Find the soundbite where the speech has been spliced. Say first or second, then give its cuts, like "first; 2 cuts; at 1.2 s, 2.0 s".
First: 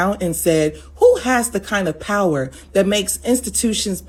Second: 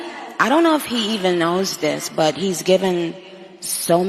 second; 1 cut; at 2.4 s